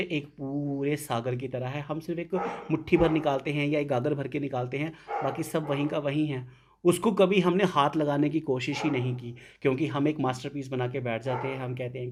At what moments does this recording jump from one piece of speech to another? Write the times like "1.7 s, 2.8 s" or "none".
none